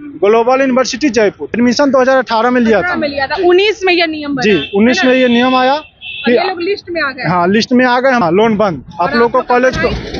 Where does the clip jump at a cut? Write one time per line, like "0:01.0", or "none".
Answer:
0:01.5
0:08.2